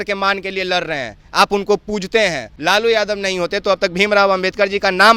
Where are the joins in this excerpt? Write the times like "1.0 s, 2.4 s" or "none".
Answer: 2.5 s